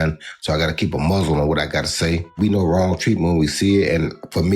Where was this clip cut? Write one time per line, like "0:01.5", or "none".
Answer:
0:02.3

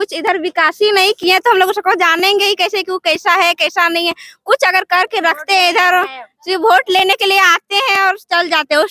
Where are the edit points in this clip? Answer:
none

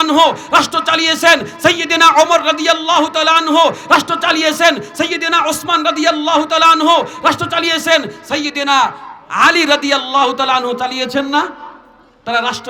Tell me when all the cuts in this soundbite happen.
none

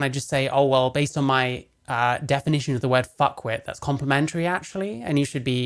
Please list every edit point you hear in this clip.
none

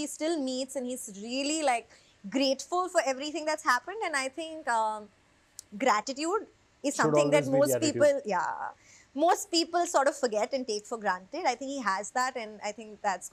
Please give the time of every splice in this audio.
none

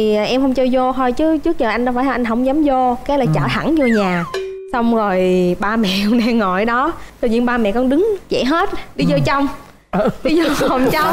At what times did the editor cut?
none

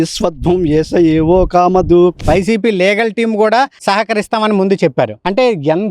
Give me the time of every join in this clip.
0:02.2

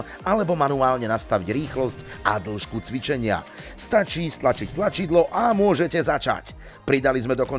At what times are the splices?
none

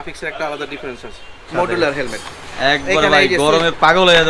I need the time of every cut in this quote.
0:01.5

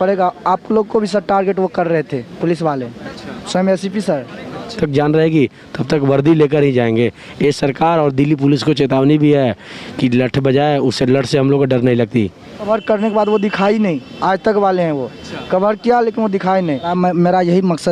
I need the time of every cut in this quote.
0:04.7
0:12.7
0:16.9

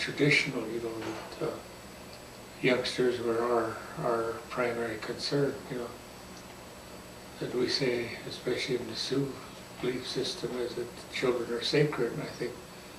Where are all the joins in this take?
0:06.0

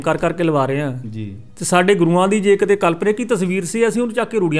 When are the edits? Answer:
none

